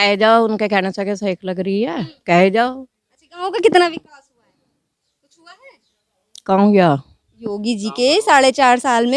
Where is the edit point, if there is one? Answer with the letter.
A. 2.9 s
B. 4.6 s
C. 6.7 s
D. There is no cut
D